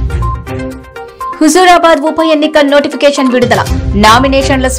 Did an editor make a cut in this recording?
no; 0 cuts

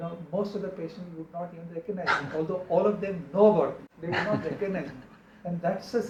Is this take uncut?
yes; 0 cuts

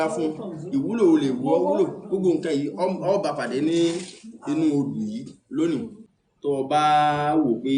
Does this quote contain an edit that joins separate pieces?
yes; 1 cut; at 5.7 s

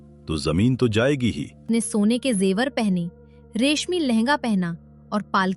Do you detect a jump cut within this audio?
yes; 1 cut; at 1.5 s

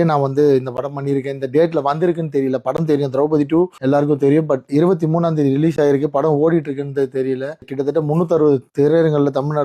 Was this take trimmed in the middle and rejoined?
yes; 3 cuts; at 3.8 s, 7.7 s, 8.7 s

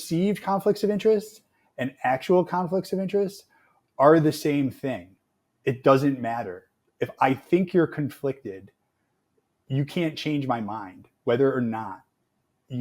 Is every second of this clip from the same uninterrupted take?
yes; 0 cuts

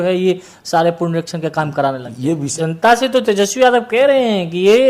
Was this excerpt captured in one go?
no; 1 cut; at 2.5 s

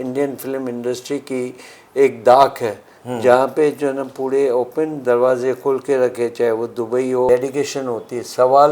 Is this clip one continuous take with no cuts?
no; 1 cut; at 7.3 s

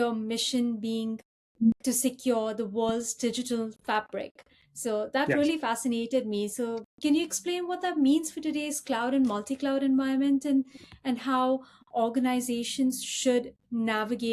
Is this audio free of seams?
yes; 0 cuts

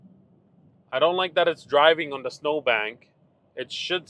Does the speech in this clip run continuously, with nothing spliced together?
yes; 0 cuts

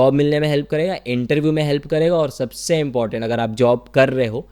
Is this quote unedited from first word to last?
yes; 0 cuts

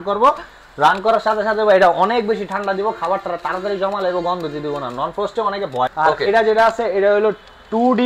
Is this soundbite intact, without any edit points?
no; 1 cut; at 5.9 s

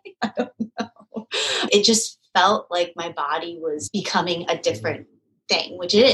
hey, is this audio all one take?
no; 2 cuts; at 1.7 s, 3.8 s

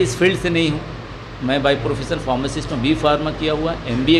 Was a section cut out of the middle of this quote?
no; 0 cuts

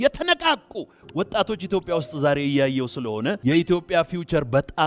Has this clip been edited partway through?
yes; 1 cut; at 3.4 s

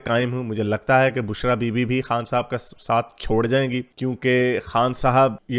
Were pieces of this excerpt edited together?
no; 0 cuts

